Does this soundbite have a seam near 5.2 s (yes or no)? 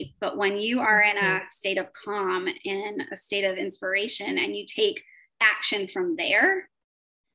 no